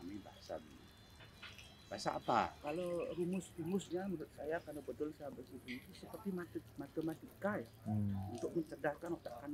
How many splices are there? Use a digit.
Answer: 1